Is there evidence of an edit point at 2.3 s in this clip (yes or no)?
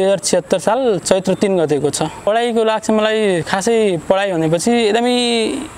yes